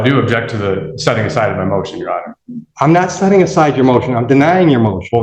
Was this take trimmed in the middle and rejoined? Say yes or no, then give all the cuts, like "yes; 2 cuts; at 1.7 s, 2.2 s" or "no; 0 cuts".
no; 0 cuts